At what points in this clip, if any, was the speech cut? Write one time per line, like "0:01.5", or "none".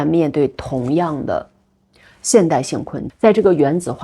0:03.0